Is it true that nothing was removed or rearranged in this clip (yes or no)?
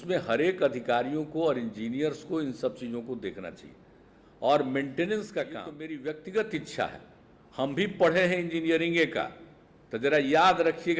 no